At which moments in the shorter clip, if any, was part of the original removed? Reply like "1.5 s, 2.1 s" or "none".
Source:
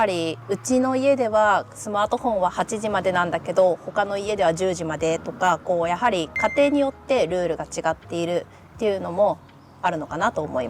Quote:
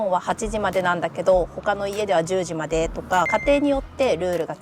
3.3 s